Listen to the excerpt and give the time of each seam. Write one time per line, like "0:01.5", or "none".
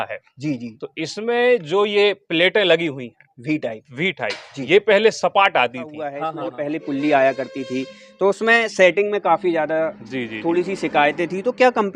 0:06.3